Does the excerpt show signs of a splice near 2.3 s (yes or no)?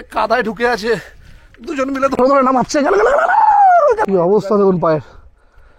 no